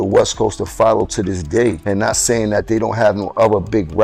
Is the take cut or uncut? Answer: cut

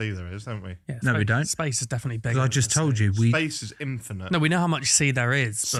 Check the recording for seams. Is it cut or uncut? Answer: uncut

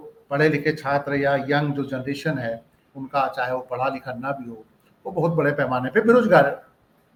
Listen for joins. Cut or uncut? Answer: uncut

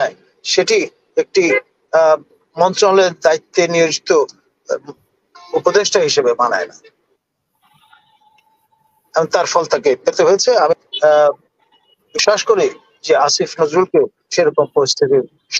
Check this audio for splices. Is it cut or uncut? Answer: uncut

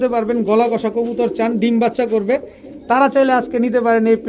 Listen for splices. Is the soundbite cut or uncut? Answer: uncut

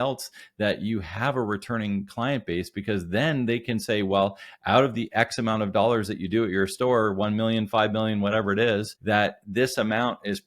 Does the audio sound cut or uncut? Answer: cut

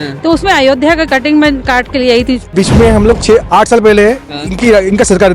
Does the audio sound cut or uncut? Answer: cut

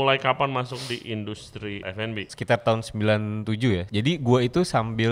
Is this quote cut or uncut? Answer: cut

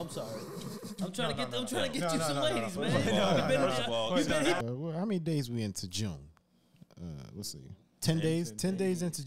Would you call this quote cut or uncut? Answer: cut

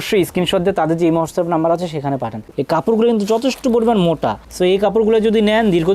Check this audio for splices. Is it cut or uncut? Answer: cut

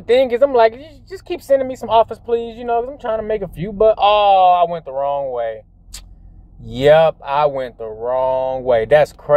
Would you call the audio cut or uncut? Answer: uncut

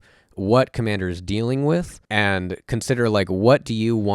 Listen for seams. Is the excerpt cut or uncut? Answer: cut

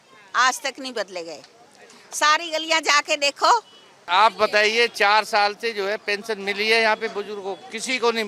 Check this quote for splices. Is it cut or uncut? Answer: cut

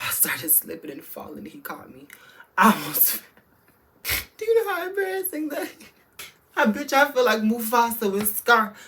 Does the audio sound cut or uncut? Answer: uncut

